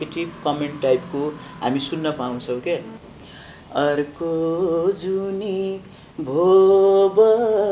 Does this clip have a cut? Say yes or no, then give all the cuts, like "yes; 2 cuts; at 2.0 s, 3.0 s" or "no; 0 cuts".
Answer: yes; 1 cut; at 3.0 s